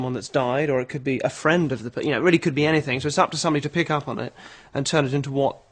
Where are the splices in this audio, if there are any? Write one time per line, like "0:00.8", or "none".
0:02.4